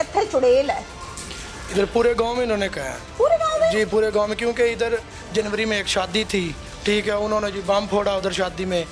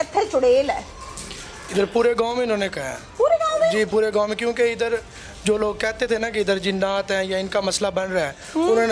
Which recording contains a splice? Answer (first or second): first